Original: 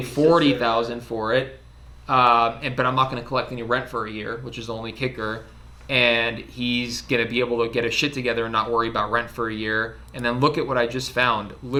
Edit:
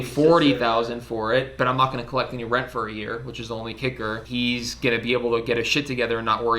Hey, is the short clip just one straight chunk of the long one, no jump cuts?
no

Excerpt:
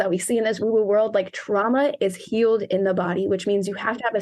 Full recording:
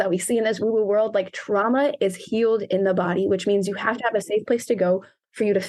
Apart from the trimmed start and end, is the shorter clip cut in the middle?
no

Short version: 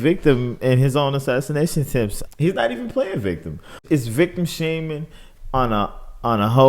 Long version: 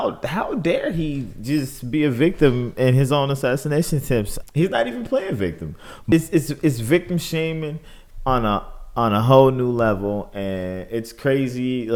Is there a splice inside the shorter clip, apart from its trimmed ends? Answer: yes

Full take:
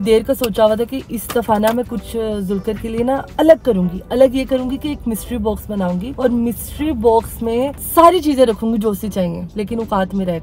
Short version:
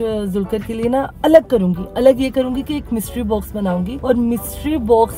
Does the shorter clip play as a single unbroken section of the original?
yes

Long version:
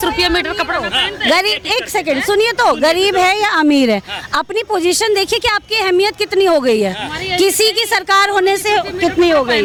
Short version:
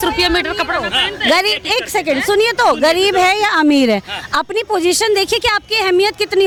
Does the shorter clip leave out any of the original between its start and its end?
no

